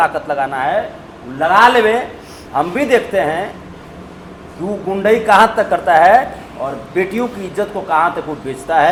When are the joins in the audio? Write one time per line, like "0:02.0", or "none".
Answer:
none